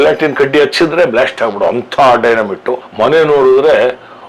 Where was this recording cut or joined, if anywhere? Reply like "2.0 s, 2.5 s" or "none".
2.8 s